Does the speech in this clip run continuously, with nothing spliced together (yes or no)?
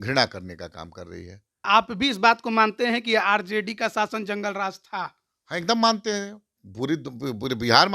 no